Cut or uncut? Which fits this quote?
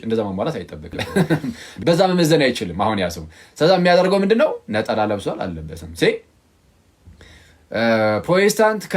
cut